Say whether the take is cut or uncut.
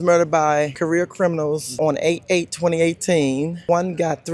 cut